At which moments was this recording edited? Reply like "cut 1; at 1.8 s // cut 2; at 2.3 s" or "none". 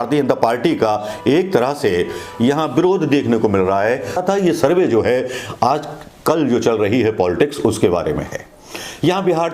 cut 1; at 4.2 s